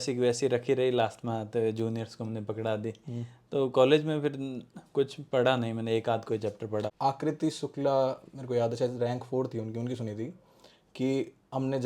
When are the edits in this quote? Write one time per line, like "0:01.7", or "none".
0:06.9